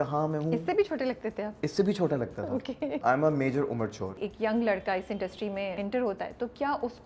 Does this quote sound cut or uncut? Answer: cut